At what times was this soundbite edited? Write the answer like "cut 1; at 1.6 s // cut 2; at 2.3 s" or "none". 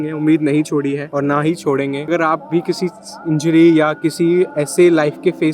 cut 1; at 1.1 s // cut 2; at 2.1 s